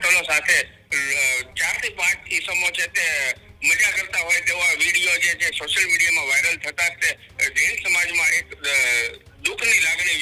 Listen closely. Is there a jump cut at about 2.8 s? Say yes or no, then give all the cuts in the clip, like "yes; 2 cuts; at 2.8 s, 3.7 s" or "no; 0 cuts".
no; 0 cuts